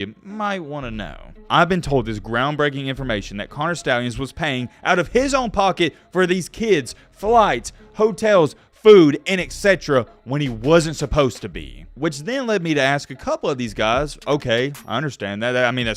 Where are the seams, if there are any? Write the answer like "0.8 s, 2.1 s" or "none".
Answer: 1.3 s